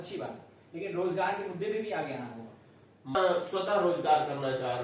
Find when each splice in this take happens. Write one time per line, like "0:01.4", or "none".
0:03.1